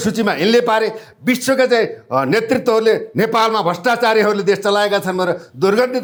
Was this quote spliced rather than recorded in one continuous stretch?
no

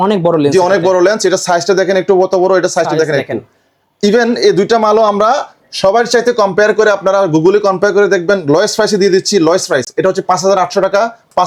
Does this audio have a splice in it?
no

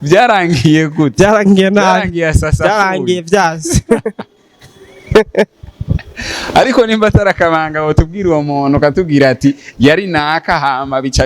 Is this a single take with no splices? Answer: yes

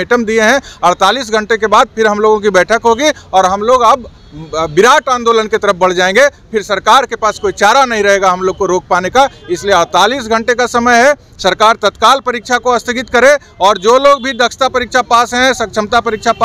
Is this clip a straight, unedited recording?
yes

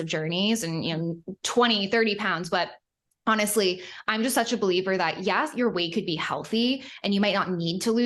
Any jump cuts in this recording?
no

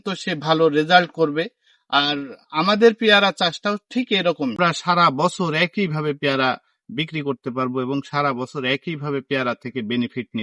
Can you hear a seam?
yes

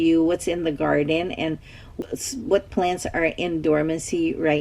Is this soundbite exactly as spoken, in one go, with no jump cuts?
no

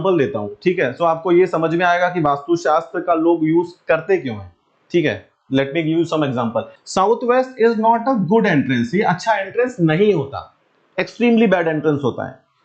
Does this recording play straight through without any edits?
no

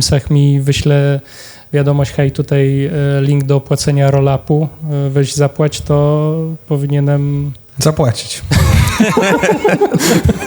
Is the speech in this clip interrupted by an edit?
no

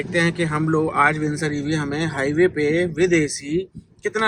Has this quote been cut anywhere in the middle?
no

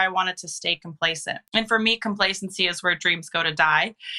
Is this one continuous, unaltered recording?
no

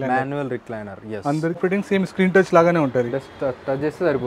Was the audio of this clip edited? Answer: yes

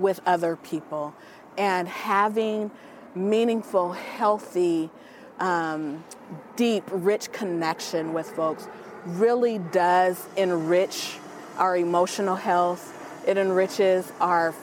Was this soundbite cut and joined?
no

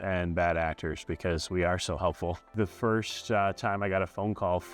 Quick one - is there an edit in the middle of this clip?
yes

